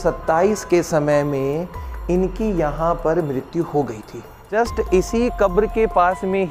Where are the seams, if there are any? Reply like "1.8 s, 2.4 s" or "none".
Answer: 4.3 s